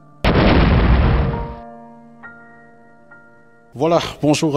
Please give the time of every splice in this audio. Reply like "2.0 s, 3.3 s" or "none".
3.6 s

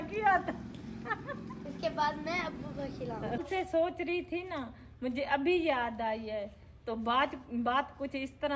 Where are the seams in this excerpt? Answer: 3.5 s

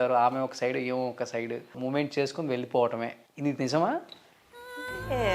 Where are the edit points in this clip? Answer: 1.8 s, 3.2 s

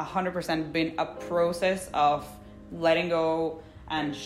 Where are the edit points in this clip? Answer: none

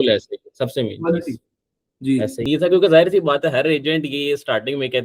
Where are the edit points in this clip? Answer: 2.5 s

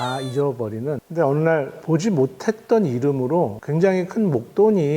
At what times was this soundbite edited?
1.0 s, 1.8 s, 3.6 s

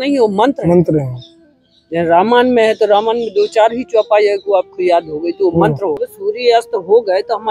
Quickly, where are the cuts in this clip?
6.1 s

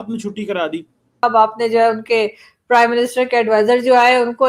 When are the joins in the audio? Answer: 1.1 s

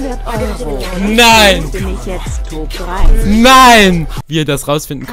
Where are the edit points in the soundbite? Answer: 4.1 s

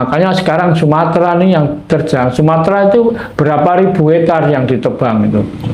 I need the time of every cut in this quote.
none

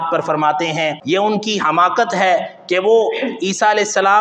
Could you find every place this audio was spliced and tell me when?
1.0 s

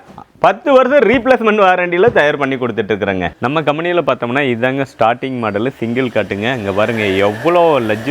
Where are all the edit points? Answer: none

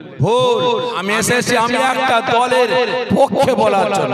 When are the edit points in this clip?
1.0 s

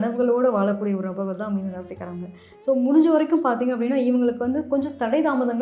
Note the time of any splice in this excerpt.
none

